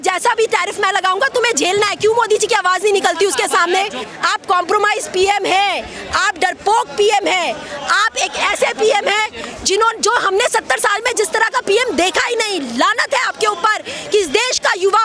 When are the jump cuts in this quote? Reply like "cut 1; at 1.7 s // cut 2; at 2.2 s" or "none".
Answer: cut 1; at 4.0 s